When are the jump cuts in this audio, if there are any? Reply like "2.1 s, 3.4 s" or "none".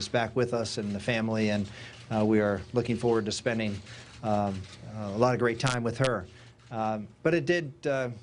1.5 s